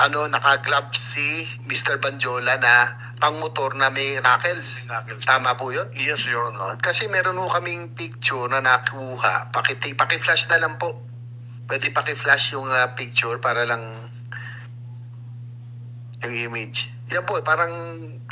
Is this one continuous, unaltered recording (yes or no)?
yes